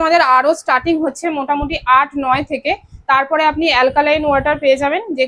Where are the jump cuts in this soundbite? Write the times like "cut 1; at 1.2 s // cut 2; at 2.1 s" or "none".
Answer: none